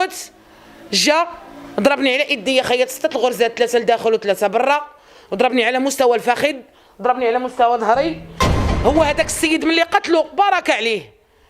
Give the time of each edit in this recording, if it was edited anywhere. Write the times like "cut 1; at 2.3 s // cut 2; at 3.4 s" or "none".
cut 1; at 8.4 s